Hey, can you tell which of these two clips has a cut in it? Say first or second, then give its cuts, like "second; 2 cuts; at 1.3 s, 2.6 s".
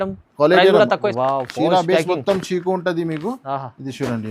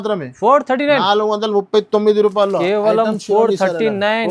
first; 1 cut; at 1.0 s